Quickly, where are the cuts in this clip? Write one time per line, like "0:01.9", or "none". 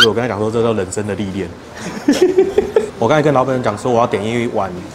0:02.9